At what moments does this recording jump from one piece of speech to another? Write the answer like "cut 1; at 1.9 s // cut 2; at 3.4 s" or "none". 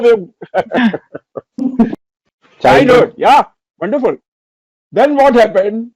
cut 1; at 2.0 s

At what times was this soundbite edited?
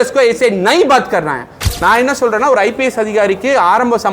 cut 1; at 1.6 s

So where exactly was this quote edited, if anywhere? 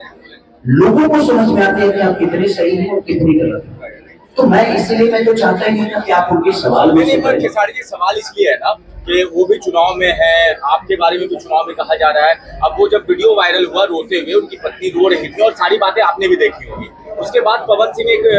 none

